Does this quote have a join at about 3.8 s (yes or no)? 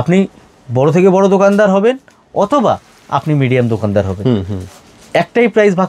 no